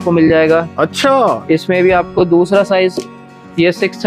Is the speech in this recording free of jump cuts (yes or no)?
yes